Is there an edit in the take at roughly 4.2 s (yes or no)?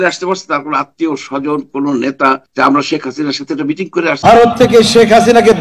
yes